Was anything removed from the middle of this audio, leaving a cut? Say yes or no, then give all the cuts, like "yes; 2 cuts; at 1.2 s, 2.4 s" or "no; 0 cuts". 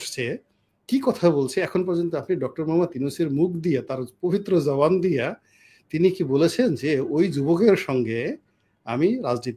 no; 0 cuts